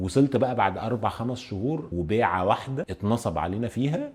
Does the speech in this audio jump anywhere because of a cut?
no; 0 cuts

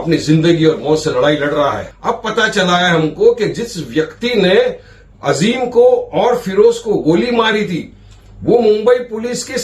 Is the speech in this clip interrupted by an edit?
yes; 1 cut; at 1.9 s

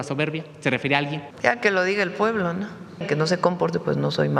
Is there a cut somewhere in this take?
yes; 2 cuts; at 1.3 s, 3.0 s

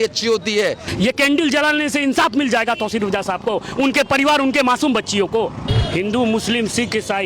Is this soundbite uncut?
no; 2 cuts; at 0.8 s, 5.6 s

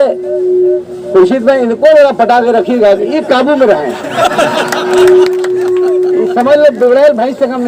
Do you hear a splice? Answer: no; 0 cuts

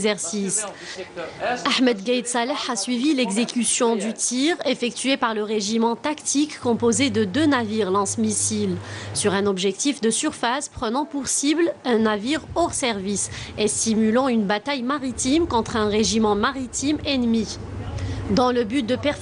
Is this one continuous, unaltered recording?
yes; 0 cuts

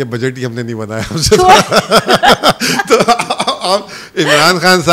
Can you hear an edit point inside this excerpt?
no; 0 cuts

